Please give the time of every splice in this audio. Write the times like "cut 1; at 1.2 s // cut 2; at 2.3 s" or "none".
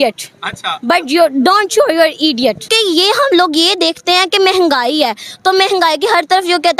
cut 1; at 2.7 s